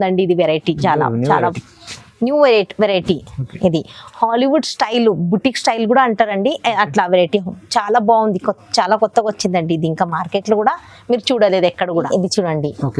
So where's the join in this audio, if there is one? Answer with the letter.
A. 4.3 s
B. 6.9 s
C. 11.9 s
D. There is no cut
C